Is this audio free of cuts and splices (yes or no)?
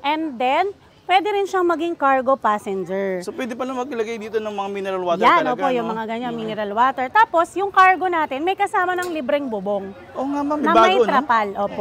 yes